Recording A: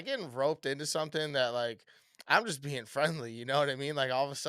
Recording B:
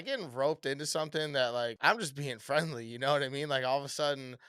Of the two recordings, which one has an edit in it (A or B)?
B